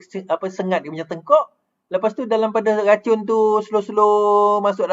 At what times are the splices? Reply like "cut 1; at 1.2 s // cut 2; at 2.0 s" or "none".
none